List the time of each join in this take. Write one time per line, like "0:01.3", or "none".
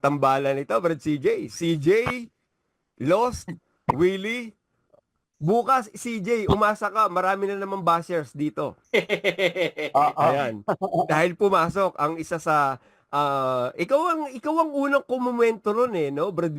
0:08.8